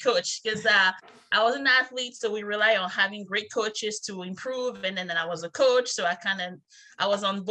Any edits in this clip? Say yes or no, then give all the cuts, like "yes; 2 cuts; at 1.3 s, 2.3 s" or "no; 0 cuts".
no; 0 cuts